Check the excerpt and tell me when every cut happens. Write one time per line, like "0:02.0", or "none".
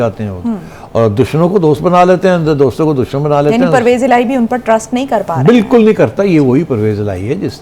none